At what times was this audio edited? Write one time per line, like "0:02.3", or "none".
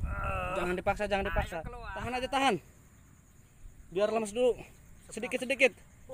0:01.8